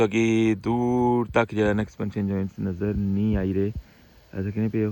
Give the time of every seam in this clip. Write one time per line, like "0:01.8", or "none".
none